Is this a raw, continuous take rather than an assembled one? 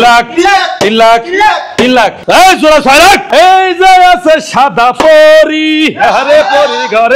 no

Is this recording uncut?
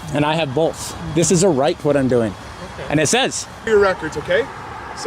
no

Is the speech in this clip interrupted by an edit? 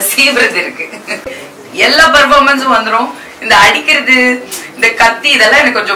yes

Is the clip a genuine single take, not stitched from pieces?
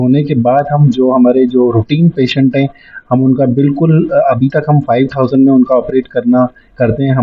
yes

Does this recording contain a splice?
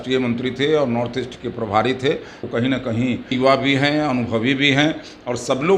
yes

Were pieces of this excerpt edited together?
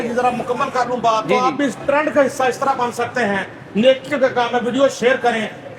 no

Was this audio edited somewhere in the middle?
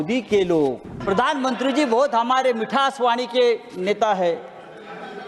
yes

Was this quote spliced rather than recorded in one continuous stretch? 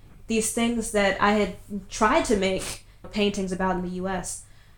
yes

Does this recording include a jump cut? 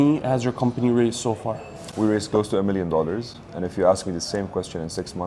no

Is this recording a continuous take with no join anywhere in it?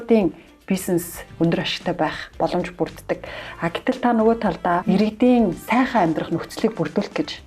no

